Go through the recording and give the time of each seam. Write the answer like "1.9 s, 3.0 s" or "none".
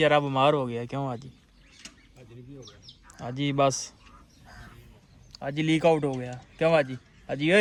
none